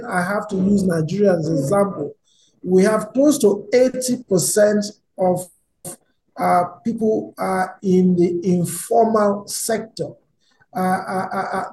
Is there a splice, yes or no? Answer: no